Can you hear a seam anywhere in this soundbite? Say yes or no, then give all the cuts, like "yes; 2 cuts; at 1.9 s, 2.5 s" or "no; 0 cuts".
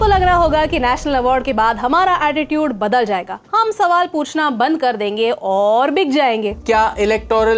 yes; 1 cut; at 6.6 s